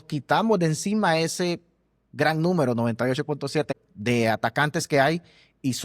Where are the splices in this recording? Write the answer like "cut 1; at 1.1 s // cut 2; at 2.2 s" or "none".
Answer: cut 1; at 3.7 s